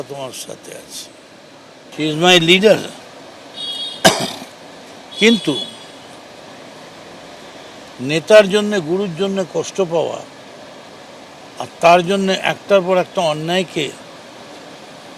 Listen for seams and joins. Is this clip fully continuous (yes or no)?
no